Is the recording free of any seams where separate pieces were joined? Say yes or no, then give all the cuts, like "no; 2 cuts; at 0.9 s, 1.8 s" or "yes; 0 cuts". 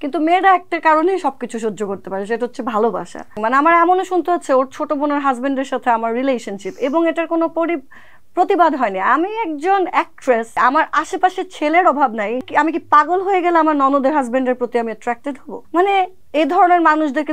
no; 5 cuts; at 3.4 s, 10.5 s, 12.5 s, 15.5 s, 16.2 s